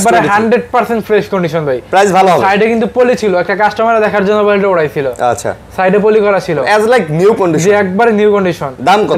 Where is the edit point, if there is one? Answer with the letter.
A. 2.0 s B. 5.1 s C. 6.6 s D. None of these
D